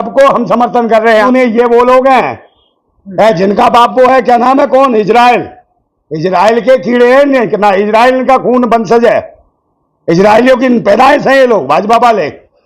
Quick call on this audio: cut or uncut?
cut